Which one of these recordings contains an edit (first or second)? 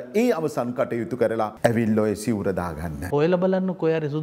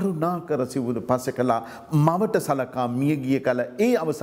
first